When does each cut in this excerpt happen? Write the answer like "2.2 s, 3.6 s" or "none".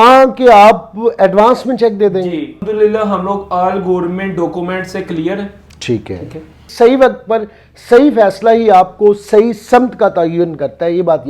2.6 s, 6.6 s